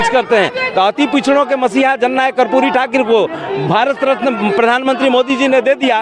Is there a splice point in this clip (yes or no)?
no